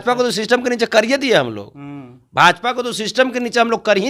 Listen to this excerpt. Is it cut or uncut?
uncut